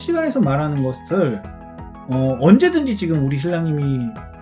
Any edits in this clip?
no; 0 cuts

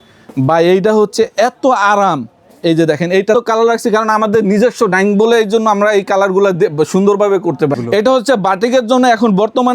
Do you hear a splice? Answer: yes; 2 cuts; at 3.3 s, 7.8 s

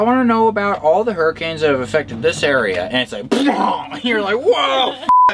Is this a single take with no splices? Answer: yes; 0 cuts

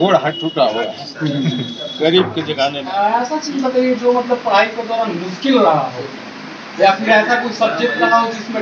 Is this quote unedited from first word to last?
no; 1 cut; at 2.8 s

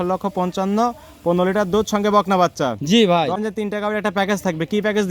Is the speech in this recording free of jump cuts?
no; 1 cut; at 3.4 s

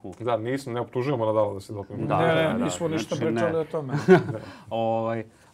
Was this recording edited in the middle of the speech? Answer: no; 0 cuts

